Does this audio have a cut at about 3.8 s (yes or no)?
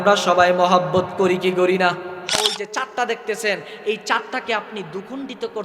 no